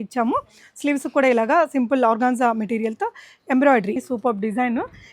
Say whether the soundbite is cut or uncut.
cut